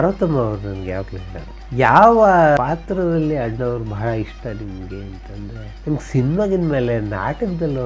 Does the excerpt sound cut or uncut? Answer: uncut